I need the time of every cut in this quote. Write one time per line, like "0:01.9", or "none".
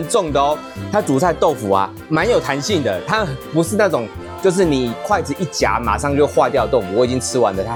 none